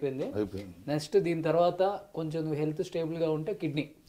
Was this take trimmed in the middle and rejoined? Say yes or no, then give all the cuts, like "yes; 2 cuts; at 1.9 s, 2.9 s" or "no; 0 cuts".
no; 0 cuts